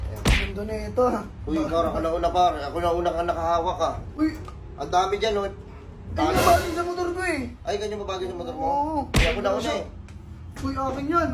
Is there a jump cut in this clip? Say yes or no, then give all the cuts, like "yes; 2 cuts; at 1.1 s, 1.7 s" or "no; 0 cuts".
no; 0 cuts